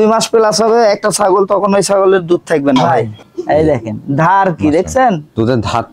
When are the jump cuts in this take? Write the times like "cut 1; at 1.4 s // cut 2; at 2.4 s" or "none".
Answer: cut 1; at 2.8 s